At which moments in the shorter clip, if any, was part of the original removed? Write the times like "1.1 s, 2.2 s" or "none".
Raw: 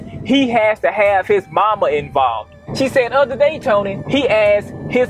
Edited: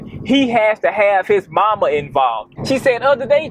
2.5 s